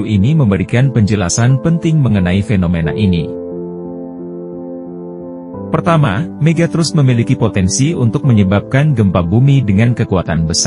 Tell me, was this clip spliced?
yes; 2 cuts; at 3.2 s, 5.5 s

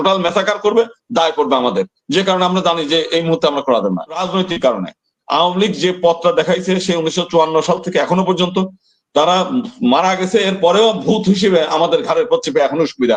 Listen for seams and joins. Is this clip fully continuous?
no; 1 cut; at 4.2 s

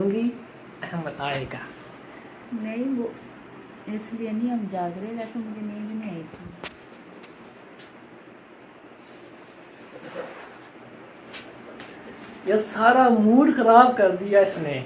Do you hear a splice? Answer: no; 0 cuts

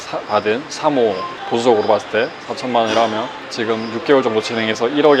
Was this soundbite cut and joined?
no; 0 cuts

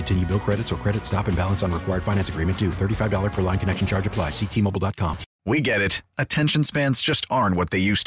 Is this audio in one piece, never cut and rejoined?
no; 1 cut; at 5.3 s

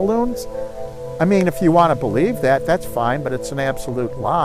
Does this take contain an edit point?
no; 0 cuts

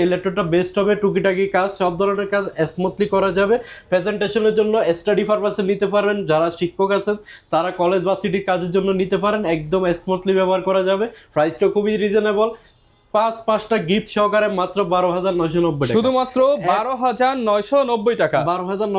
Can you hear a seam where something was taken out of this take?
no; 0 cuts

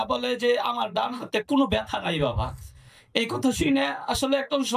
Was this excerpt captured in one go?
yes; 0 cuts

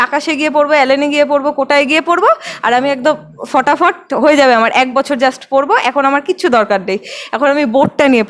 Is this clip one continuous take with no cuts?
yes; 0 cuts

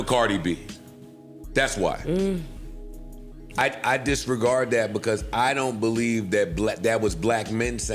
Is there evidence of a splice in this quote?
yes; 1 cut; at 3.6 s

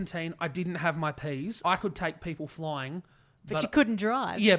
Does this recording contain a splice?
yes; 1 cut; at 1.6 s

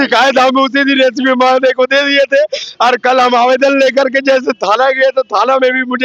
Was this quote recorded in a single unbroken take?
yes; 0 cuts

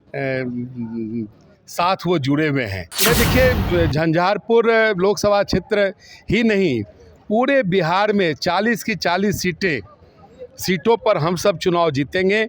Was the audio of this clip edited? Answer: yes; 1 cut; at 2.8 s

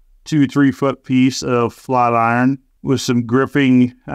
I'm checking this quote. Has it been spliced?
no; 0 cuts

